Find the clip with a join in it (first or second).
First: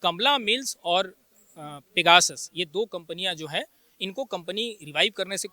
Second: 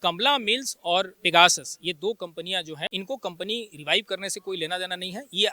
second